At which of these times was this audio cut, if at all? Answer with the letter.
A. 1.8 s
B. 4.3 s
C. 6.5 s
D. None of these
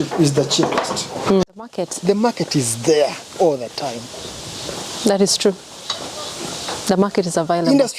A